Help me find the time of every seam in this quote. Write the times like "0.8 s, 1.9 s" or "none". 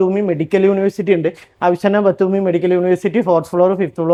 none